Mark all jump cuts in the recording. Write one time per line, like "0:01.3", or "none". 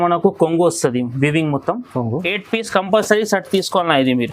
0:02.3